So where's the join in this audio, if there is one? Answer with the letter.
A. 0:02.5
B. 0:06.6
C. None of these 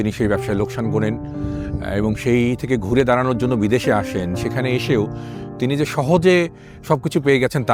C